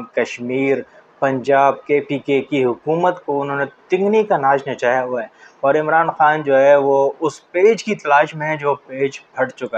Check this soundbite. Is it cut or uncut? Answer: uncut